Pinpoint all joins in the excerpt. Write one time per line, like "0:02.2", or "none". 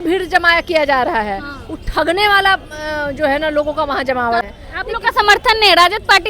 0:04.4